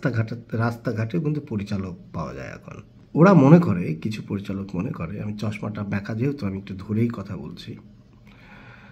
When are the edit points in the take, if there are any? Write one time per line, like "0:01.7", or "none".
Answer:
none